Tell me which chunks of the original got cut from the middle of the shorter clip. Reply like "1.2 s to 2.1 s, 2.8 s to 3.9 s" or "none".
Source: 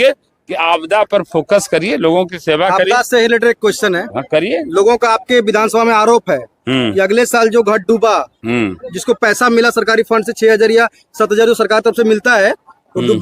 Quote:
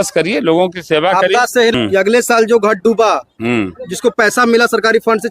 3.3 s to 6.8 s